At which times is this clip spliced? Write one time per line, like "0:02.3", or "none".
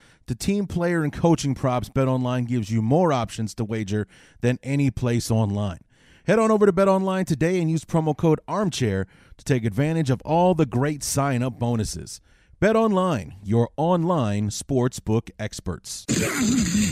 0:15.9